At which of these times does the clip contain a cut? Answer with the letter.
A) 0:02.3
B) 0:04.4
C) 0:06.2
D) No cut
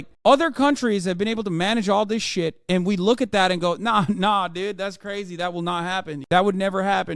C